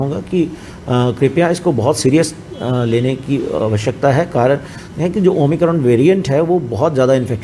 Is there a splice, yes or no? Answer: no